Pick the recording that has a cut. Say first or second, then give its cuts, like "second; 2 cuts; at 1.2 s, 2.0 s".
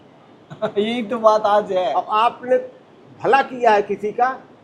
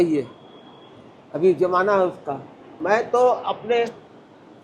second; 1 cut; at 2.7 s